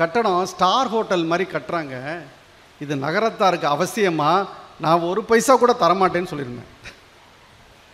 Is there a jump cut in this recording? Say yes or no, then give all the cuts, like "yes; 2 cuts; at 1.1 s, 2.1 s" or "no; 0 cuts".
no; 0 cuts